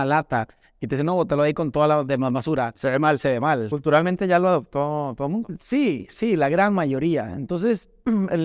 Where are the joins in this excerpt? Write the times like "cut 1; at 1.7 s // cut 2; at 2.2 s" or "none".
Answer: cut 1; at 3.7 s